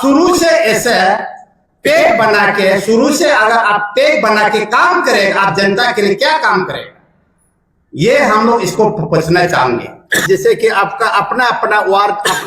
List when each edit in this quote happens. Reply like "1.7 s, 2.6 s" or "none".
10.1 s